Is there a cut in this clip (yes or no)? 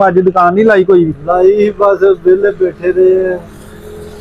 no